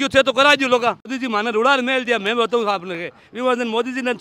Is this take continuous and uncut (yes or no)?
no